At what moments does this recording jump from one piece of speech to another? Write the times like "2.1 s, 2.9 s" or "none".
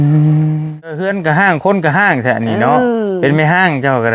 1.0 s